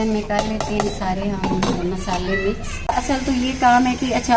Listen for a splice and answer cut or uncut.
cut